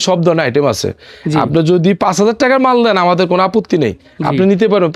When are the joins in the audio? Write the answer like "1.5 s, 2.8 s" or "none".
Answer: none